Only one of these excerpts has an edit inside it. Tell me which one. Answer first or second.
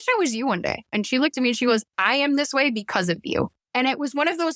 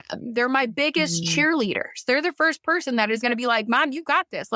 first